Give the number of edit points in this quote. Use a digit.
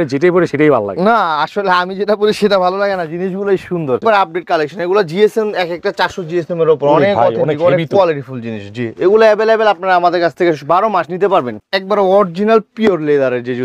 2